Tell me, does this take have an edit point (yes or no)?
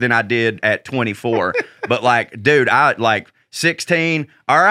no